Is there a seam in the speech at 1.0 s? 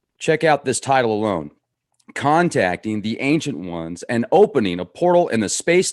no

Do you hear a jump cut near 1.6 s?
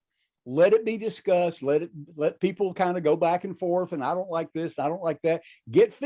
yes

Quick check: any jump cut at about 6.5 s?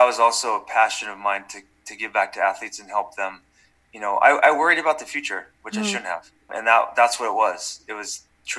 yes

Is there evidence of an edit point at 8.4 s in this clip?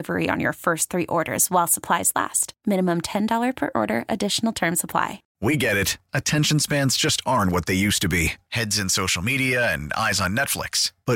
no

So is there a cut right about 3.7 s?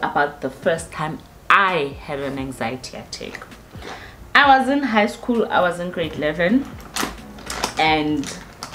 no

